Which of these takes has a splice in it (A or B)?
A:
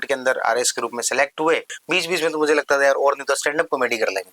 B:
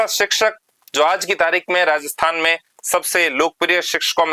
A